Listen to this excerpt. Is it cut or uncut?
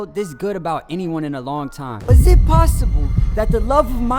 cut